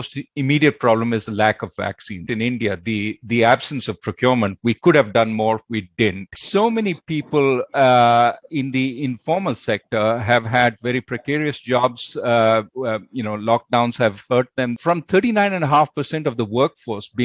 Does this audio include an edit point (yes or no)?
yes